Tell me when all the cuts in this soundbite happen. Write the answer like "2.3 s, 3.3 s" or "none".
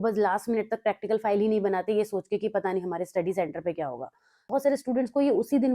4.5 s